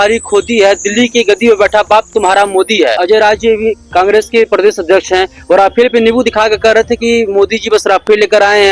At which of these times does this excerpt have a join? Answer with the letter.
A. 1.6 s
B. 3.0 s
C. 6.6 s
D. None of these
B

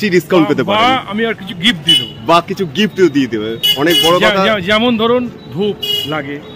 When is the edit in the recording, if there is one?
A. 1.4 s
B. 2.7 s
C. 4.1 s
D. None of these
D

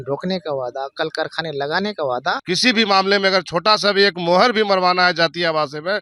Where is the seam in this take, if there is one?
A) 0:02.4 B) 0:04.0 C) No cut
A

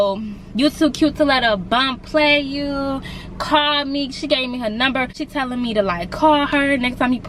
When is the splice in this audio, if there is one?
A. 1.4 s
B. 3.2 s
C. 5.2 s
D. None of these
C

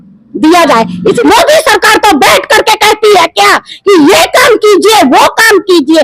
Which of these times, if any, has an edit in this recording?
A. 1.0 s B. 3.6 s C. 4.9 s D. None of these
A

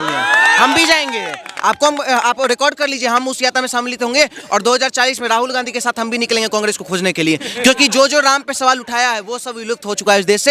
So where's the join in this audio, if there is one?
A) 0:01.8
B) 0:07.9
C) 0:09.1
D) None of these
D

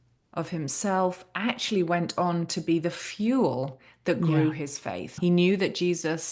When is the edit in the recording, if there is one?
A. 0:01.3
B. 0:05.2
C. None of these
B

